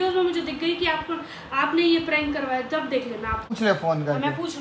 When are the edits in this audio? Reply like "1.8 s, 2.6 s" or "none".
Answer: 3.5 s